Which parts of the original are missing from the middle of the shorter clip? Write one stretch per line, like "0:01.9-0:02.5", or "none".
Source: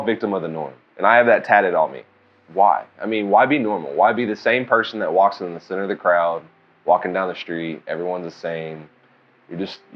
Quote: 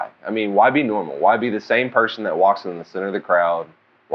none